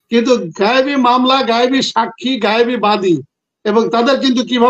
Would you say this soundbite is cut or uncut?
uncut